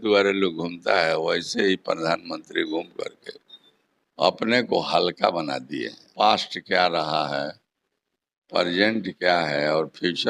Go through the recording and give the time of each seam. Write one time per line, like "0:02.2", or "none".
0:06.0

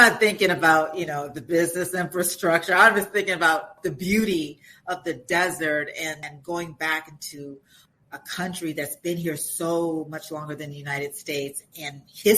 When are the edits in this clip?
0:03.7

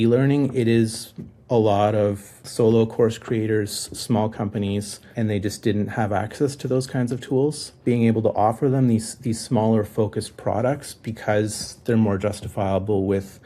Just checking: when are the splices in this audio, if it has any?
0:02.4
0:05.1
0:07.7

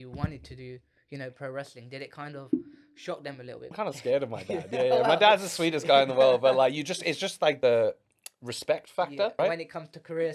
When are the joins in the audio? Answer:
0:03.7
0:07.6
0:09.4

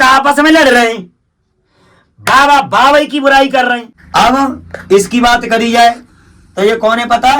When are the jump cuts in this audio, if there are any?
0:03.9

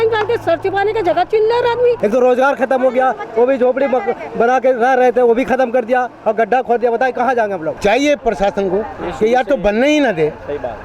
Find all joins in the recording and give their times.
0:02.0
0:07.7

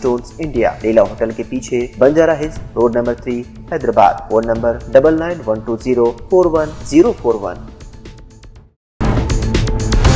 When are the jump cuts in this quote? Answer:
0:09.0

